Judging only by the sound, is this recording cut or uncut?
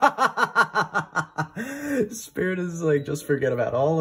uncut